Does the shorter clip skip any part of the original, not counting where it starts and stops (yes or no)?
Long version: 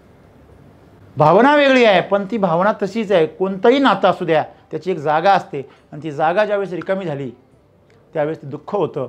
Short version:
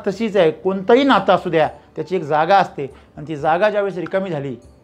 no